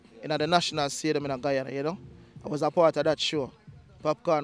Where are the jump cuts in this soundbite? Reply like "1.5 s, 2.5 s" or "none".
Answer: none